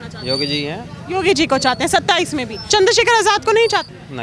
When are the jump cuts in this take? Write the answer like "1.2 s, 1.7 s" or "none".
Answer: 2.5 s